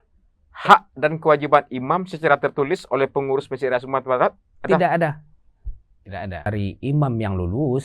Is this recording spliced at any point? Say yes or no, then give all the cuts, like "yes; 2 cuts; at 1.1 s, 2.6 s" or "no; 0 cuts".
yes; 1 cut; at 6.5 s